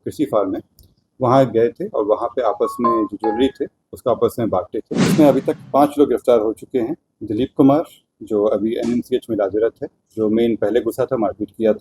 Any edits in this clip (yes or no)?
yes